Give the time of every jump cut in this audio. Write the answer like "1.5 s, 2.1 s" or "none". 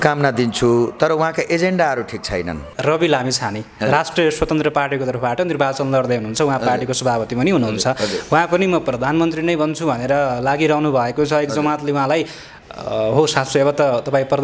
2.6 s